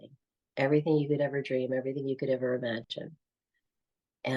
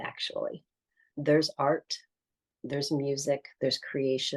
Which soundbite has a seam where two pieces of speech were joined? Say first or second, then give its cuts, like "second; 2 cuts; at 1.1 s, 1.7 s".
second; 1 cut; at 1.1 s